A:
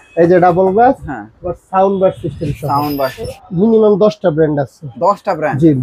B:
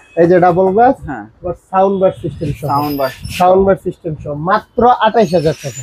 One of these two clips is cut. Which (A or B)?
A